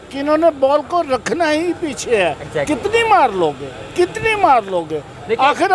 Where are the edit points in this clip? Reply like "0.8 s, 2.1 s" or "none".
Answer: none